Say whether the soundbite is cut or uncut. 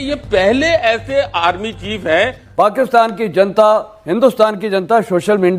cut